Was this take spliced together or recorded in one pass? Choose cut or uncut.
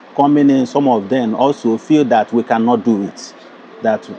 uncut